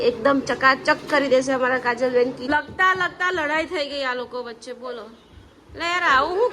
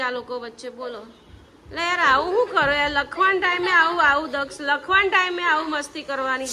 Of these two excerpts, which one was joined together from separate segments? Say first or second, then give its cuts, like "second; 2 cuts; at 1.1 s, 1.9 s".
first; 1 cut; at 2.4 s